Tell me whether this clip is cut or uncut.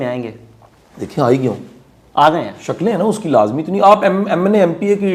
uncut